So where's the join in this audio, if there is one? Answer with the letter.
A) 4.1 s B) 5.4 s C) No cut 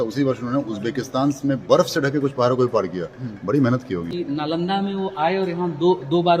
A